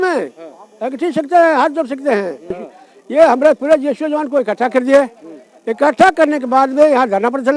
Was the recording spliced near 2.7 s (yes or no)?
yes